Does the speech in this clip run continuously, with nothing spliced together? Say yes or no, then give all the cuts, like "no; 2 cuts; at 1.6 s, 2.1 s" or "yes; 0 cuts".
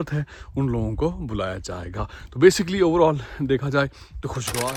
yes; 0 cuts